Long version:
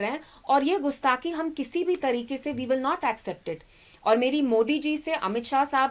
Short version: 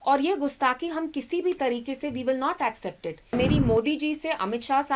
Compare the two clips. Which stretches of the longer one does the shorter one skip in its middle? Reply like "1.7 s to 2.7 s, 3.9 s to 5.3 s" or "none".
3.8 s to 4.2 s